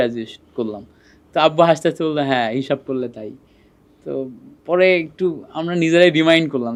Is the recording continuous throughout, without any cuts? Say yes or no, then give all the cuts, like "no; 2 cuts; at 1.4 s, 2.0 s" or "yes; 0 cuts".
yes; 0 cuts